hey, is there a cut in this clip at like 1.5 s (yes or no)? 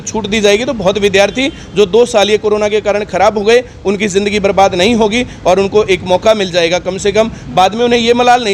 no